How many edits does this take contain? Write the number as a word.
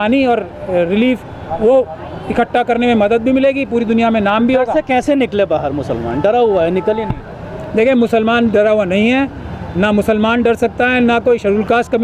zero